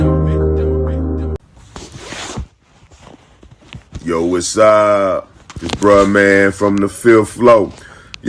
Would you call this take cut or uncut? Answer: cut